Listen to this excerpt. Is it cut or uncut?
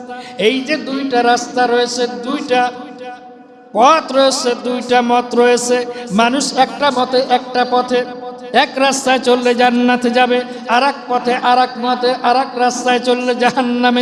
uncut